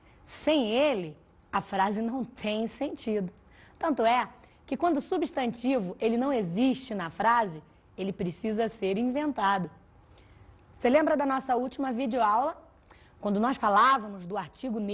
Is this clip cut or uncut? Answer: cut